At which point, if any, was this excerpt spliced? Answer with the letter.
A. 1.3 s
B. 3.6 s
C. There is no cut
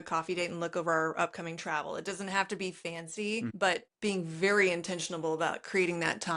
B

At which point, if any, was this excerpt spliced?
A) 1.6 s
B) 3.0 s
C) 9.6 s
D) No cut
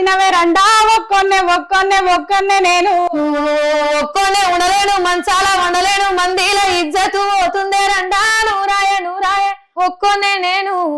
C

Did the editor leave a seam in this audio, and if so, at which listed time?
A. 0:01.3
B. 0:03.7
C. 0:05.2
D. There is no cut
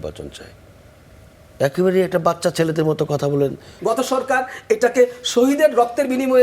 B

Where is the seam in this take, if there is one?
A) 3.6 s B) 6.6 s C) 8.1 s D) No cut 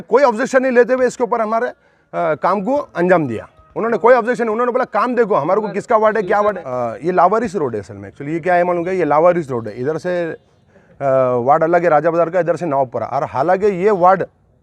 B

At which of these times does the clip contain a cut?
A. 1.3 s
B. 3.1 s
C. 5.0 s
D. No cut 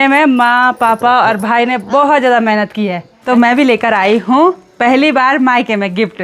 B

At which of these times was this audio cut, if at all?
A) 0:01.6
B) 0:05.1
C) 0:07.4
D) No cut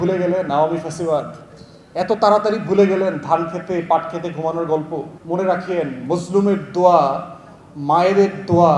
B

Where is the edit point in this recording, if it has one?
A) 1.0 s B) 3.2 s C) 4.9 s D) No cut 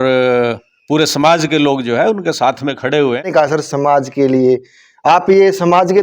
B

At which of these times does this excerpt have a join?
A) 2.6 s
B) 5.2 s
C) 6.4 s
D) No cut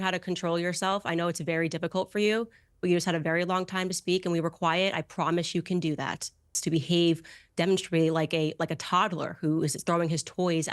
C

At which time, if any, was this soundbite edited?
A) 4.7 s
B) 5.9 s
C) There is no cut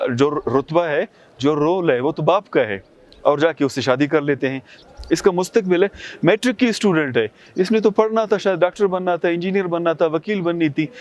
A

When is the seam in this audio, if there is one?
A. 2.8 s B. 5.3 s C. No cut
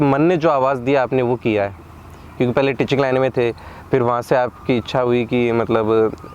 C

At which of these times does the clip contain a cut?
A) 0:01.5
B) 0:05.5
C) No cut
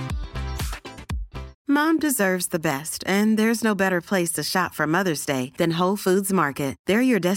A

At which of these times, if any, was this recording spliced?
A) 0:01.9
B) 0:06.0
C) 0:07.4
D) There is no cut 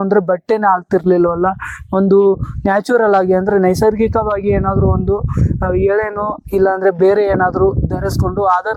D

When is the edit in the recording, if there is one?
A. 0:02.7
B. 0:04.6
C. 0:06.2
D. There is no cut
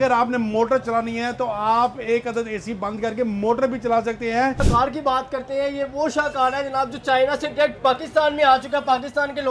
B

